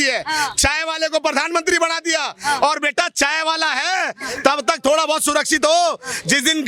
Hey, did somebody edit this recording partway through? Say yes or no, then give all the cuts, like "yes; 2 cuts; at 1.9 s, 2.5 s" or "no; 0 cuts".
no; 0 cuts